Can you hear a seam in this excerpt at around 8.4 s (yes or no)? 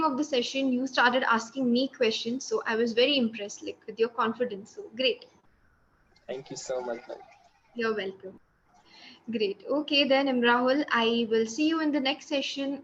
no